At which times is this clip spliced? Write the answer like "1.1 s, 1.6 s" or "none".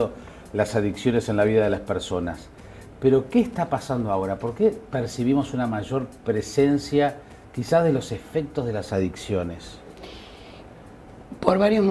4.8 s

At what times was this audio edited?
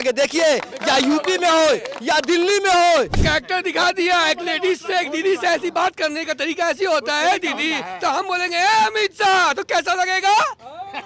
3.2 s

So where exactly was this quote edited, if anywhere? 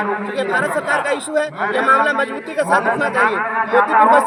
none

